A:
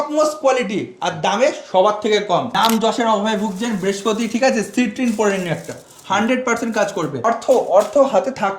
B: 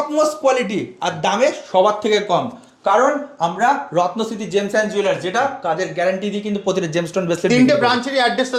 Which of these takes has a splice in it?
A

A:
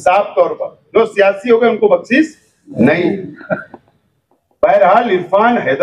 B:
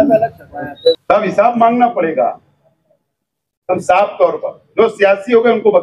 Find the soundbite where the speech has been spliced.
B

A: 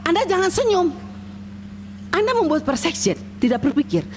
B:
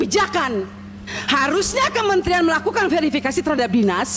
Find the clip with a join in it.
B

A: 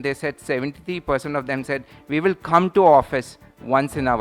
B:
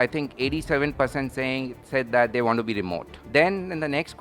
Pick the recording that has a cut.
B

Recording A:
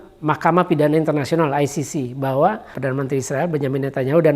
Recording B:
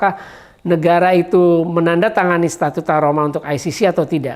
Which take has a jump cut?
A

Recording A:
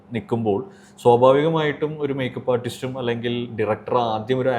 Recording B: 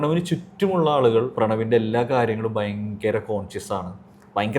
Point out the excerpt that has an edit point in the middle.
B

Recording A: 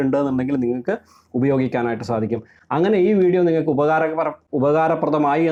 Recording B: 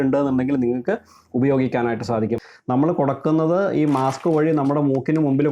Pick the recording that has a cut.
B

